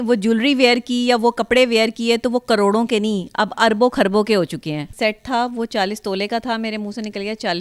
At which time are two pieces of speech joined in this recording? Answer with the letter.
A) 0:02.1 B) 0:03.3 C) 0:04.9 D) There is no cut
C